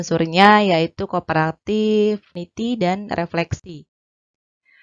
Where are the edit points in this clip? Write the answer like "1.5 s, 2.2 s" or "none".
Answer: 2.4 s